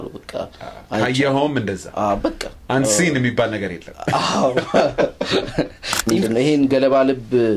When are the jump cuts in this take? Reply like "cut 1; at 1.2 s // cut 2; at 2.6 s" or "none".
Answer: cut 1; at 6.2 s